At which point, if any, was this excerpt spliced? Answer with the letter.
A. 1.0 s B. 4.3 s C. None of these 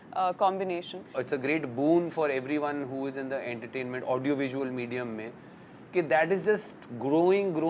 A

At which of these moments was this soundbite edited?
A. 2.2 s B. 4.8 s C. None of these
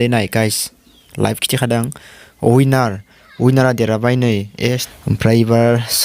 B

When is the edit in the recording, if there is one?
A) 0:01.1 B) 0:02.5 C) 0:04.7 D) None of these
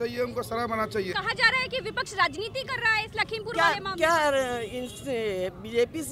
A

